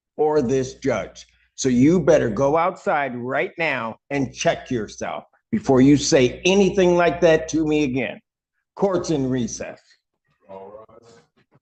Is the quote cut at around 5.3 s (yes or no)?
no